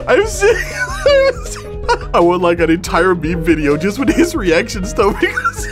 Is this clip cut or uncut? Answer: cut